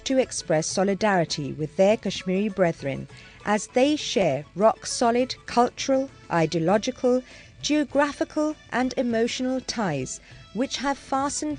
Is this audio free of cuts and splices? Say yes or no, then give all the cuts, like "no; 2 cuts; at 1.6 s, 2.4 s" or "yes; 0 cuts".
no; 1 cut; at 1.2 s